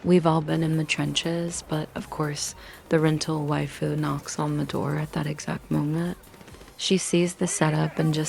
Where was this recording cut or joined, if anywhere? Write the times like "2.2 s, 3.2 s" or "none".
none

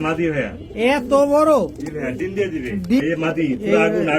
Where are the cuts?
3.0 s

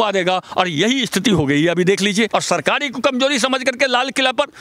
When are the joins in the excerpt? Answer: 2.3 s

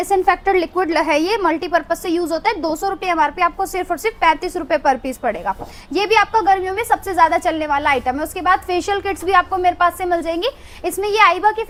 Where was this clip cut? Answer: none

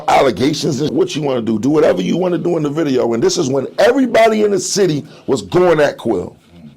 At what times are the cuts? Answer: 0.9 s

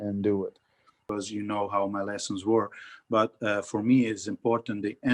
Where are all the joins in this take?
1.0 s

